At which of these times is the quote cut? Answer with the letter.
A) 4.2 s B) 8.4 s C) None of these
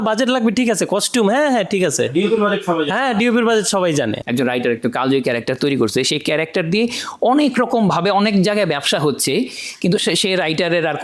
A